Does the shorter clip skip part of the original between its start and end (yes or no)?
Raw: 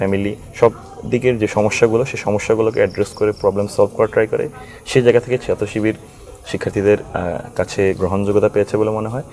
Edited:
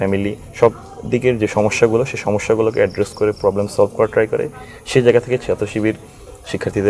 no